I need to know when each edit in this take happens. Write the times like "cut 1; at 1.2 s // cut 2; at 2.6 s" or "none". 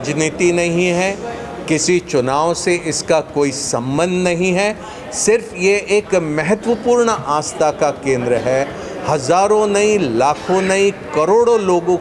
none

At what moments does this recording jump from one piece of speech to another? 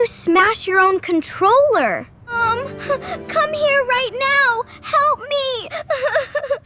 cut 1; at 2.2 s

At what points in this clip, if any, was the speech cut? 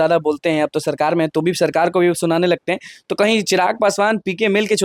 none

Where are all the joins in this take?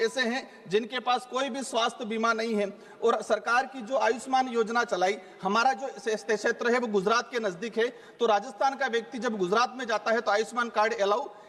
none

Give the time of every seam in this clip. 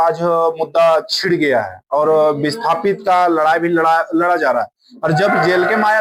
none

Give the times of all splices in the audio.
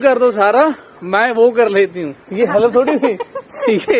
none

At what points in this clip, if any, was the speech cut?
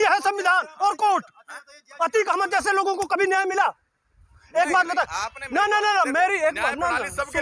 none

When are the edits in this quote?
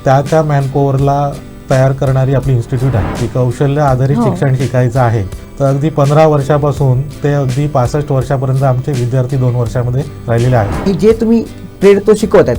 cut 1; at 3.2 s // cut 2; at 5.4 s // cut 3; at 10.8 s

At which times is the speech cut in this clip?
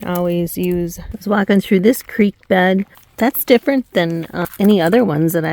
cut 1; at 1.1 s // cut 2; at 3.0 s // cut 3; at 4.4 s

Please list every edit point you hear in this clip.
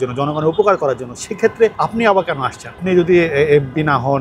cut 1; at 2.8 s

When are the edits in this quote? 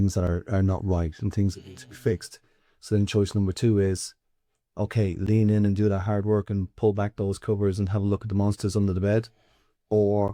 none

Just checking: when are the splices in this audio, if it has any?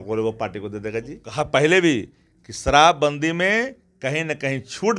cut 1; at 1.2 s

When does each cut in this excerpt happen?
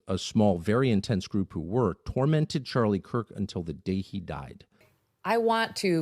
cut 1; at 4.8 s

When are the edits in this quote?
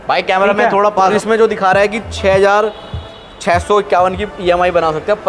cut 1; at 1.1 s

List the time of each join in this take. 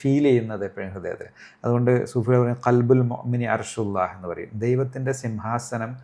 none

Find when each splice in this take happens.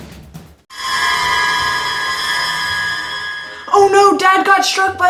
none

